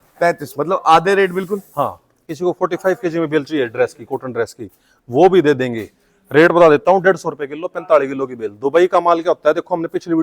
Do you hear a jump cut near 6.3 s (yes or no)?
no